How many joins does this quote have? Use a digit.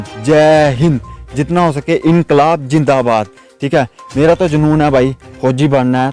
0